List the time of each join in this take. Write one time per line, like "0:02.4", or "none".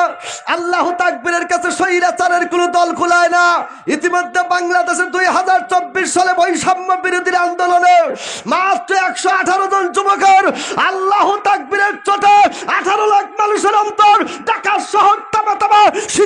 none